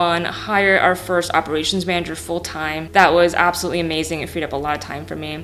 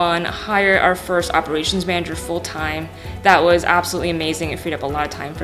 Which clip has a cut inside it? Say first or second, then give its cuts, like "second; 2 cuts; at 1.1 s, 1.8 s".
first; 1 cut; at 2.8 s